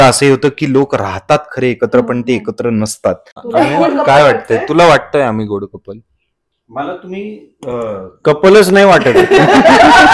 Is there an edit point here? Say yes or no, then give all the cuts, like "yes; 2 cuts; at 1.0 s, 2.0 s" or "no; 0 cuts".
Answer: yes; 1 cut; at 3.3 s